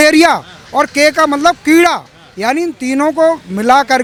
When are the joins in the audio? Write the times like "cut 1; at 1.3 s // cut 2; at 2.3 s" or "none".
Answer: none